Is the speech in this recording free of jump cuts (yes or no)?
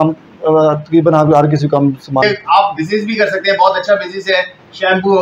no